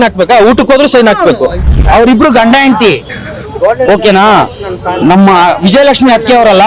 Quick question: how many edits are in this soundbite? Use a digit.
2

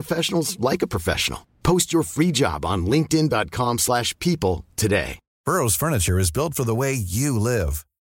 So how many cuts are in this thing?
1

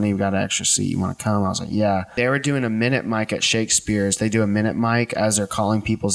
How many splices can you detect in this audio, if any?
1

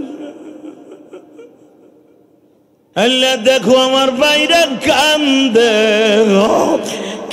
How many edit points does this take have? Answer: 1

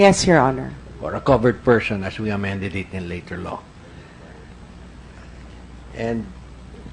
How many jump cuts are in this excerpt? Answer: 0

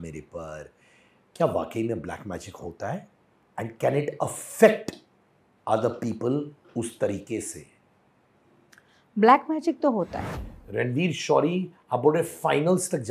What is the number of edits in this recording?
1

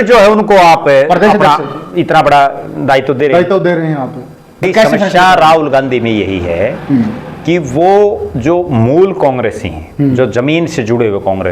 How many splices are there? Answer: 1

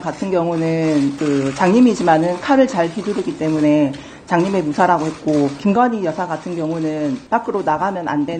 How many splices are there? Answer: 3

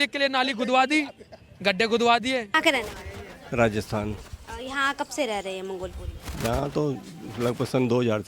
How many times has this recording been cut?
0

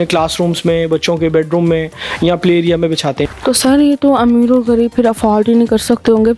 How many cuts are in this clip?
1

